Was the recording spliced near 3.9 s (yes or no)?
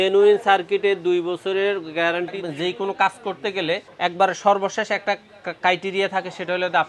yes